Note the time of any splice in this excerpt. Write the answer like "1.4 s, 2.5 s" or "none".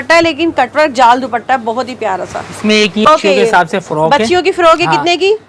3.0 s